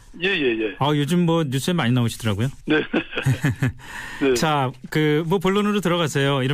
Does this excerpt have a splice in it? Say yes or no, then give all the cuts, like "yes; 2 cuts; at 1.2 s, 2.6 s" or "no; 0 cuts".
no; 0 cuts